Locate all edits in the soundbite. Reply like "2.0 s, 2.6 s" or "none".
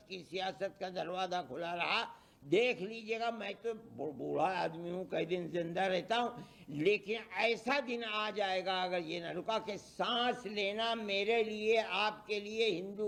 none

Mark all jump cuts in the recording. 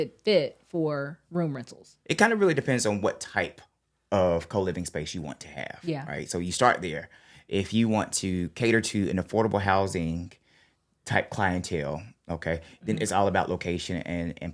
1.9 s

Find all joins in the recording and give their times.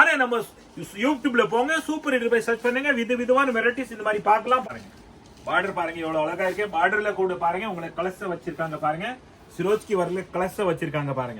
4.6 s

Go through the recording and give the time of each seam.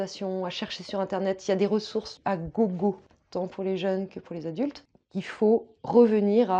2.1 s, 3.1 s, 4.9 s

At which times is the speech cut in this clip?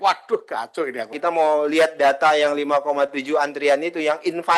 1.2 s

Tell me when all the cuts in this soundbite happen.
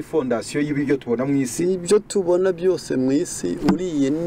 none

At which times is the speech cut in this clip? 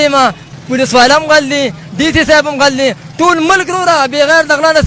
none

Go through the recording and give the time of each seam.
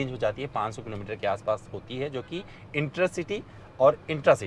none

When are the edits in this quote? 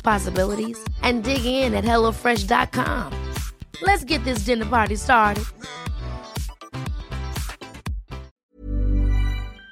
8.3 s

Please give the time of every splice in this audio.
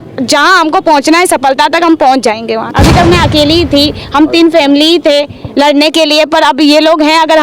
2.7 s

